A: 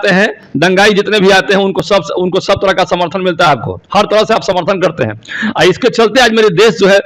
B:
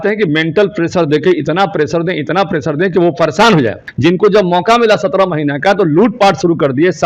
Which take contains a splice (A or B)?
B